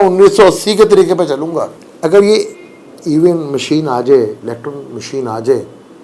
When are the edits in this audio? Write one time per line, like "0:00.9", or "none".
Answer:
0:01.8